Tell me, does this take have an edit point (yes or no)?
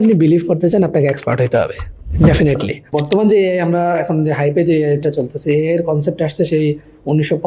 yes